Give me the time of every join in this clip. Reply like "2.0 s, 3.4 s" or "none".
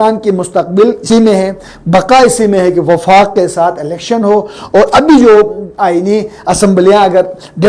1.0 s